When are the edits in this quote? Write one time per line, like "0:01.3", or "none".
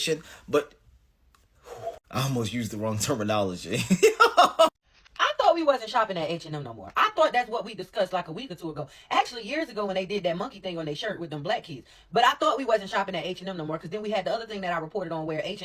0:04.8